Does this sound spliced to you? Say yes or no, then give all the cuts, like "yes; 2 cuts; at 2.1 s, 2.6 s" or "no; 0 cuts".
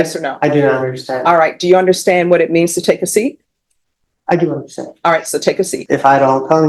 yes; 1 cut; at 5.8 s